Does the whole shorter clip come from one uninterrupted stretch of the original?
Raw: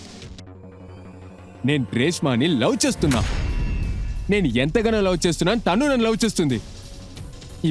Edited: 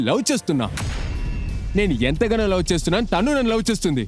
yes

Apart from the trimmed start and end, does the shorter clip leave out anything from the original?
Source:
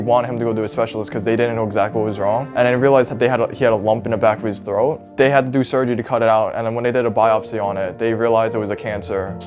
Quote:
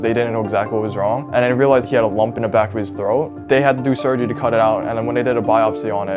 yes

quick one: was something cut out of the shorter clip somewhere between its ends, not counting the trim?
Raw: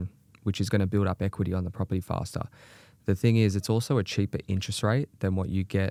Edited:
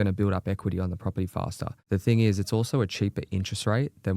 yes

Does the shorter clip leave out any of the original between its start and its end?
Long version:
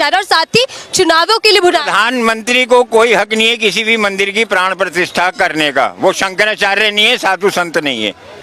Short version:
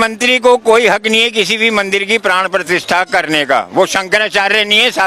no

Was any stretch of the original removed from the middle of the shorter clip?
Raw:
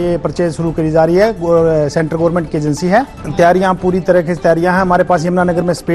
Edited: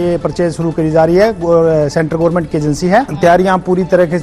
yes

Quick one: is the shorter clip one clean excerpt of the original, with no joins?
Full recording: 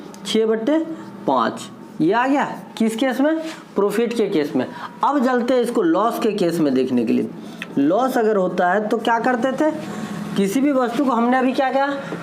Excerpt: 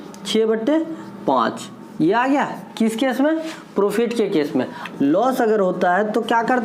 no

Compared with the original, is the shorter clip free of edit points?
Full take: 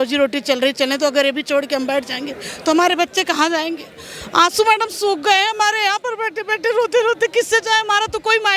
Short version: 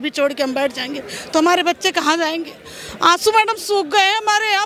yes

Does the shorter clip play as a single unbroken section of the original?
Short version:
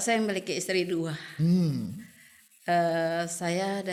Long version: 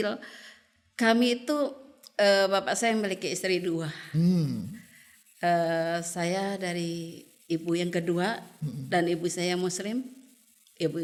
yes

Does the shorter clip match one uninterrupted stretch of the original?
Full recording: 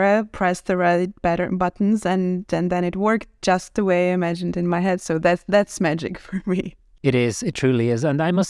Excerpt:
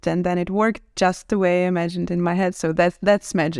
yes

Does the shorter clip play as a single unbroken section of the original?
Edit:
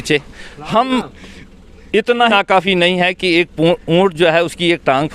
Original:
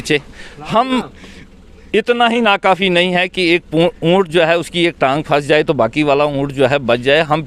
no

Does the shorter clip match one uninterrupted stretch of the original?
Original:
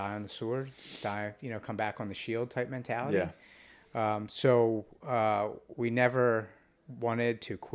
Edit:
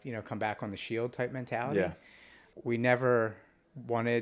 no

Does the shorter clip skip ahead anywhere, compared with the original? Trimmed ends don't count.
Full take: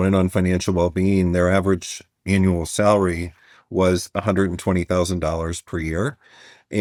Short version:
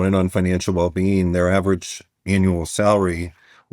no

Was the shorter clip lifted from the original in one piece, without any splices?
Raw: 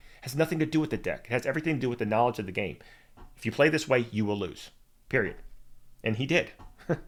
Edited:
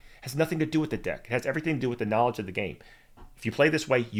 yes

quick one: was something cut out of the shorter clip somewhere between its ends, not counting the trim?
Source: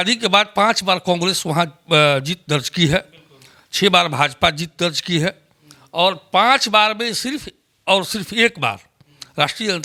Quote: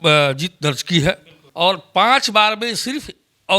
yes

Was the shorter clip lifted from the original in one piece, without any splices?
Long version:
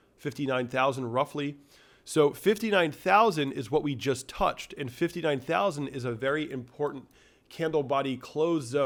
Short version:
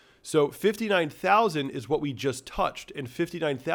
yes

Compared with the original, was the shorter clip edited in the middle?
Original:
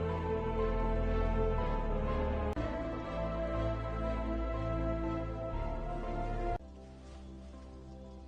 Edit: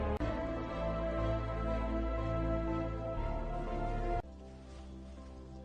no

